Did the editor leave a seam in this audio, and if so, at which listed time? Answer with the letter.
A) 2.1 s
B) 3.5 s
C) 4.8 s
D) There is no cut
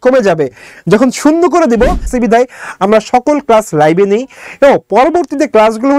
A